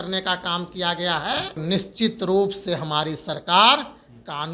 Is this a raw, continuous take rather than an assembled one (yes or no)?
no